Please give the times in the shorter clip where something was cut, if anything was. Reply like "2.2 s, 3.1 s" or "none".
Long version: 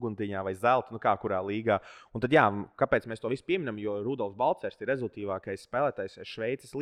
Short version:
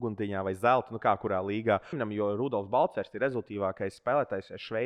2.0 s

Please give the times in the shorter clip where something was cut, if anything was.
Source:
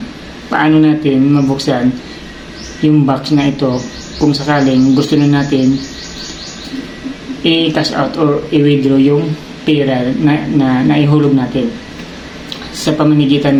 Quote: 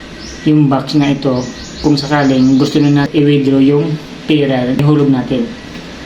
3.1 s, 4.8 s

